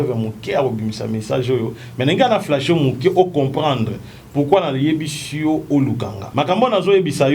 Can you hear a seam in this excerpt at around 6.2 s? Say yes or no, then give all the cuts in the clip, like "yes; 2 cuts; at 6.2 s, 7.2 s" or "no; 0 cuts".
yes; 1 cut; at 6.2 s